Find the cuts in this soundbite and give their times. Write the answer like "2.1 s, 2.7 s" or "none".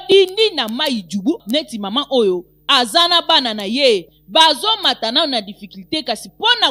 1.4 s

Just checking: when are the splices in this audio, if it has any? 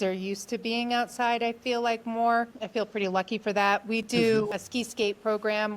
2.6 s, 4.5 s

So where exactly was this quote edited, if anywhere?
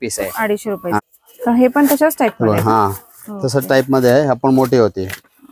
1.0 s

